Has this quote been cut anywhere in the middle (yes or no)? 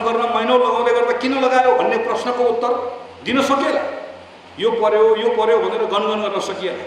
no